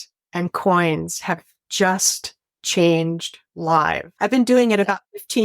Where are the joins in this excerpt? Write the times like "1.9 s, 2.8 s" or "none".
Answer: 4.1 s